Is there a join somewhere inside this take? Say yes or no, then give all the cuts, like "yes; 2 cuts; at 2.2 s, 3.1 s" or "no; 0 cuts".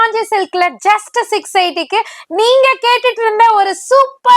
no; 0 cuts